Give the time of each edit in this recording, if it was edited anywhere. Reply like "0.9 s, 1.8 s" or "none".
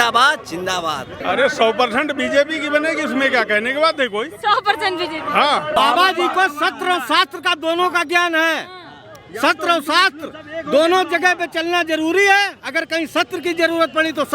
1.1 s, 5.8 s

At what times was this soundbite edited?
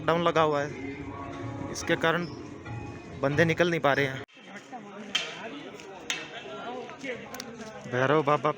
4.2 s

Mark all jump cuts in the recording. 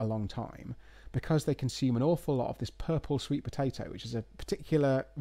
none

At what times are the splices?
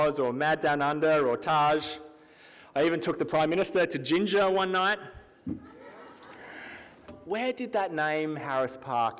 7.1 s

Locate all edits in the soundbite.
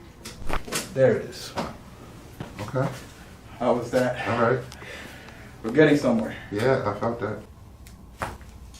1.5 s, 7.4 s

